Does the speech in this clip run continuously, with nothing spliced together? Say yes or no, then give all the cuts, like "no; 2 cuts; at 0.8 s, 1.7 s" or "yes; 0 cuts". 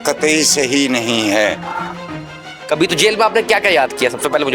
no; 1 cut; at 2.5 s